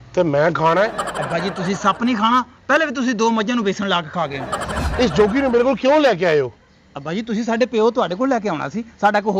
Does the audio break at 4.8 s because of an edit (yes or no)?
yes